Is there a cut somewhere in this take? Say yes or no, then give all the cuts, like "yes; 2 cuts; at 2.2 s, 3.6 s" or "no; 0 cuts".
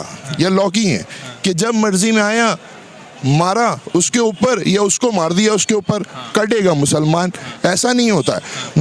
no; 0 cuts